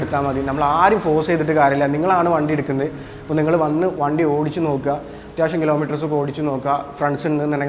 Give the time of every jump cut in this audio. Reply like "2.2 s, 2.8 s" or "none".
none